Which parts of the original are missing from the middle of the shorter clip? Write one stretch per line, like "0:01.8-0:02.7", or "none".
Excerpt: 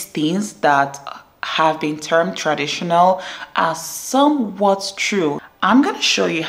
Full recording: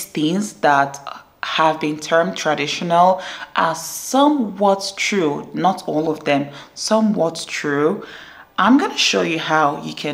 0:05.5-0:08.4